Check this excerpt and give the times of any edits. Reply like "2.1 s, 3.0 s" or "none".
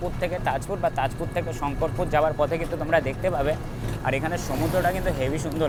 none

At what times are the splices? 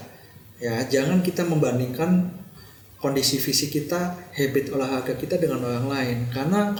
none

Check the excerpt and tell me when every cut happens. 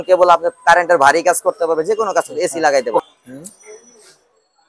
3.0 s

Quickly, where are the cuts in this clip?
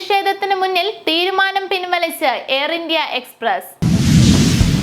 3.7 s

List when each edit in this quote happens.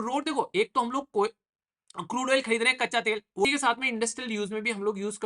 3.4 s

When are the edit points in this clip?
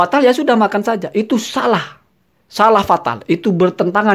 none

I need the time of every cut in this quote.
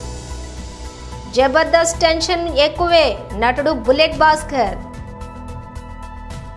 none

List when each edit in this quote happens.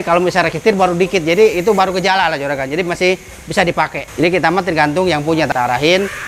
4.0 s, 5.5 s

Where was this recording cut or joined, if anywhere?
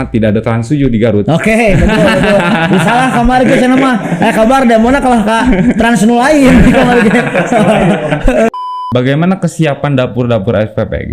8.5 s

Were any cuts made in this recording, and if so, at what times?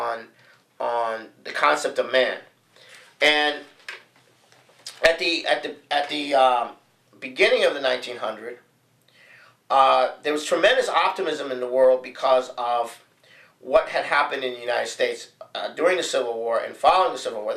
12.5 s

